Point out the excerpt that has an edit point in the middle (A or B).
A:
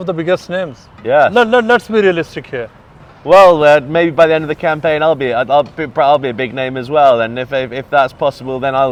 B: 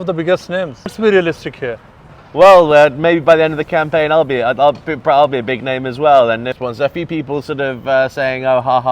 B